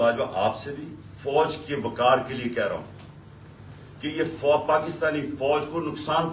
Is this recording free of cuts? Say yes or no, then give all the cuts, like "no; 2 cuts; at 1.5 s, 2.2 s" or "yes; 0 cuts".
yes; 0 cuts